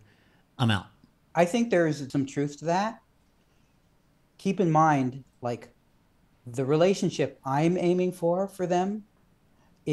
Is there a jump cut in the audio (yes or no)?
yes